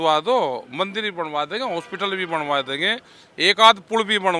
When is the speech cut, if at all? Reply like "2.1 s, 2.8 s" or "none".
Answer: none